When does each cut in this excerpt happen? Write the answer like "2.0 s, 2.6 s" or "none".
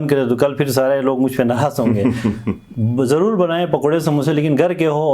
none